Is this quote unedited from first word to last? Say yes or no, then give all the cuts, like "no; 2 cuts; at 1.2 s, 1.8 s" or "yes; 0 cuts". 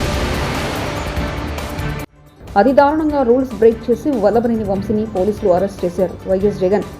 no; 1 cut; at 2.0 s